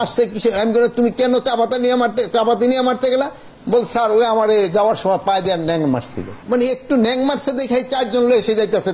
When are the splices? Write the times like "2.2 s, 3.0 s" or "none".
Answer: 6.3 s